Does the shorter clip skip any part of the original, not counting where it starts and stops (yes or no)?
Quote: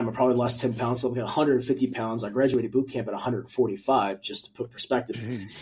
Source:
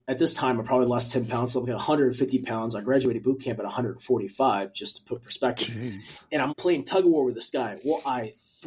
no